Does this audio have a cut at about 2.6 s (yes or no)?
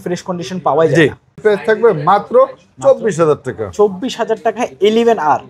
no